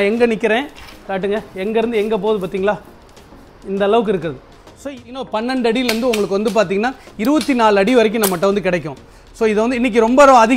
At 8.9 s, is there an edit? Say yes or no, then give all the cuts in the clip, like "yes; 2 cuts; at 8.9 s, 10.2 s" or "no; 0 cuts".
no; 1 cut; at 5.0 s